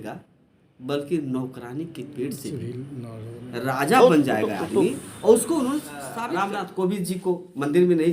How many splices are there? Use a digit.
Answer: 1